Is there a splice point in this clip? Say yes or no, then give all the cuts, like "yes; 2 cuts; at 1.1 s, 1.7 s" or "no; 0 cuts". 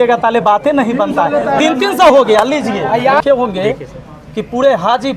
yes; 1 cut; at 3.2 s